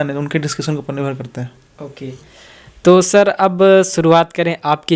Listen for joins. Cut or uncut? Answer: uncut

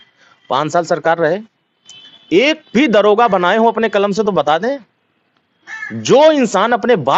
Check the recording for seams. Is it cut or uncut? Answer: uncut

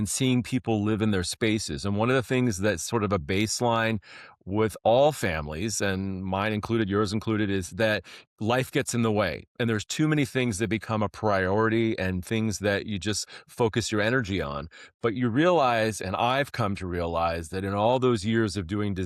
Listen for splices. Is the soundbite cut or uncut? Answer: uncut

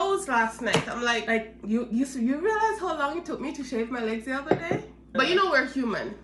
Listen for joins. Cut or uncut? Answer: cut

